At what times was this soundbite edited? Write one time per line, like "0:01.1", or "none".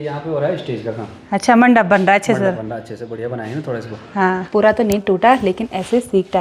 0:04.4